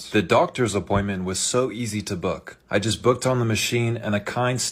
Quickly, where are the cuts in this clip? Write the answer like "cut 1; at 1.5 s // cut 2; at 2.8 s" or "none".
none